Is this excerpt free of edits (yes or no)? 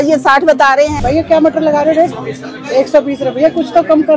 no